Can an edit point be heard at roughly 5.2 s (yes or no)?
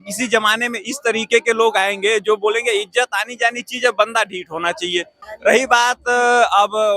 yes